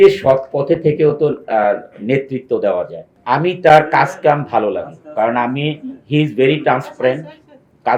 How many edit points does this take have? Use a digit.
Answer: 1